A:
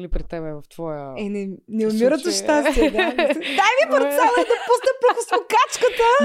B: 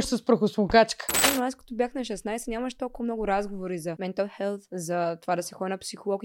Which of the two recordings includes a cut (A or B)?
B